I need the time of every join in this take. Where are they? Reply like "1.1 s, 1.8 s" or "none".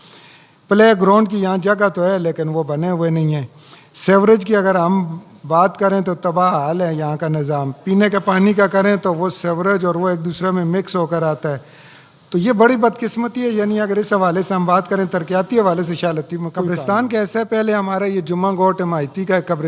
16.7 s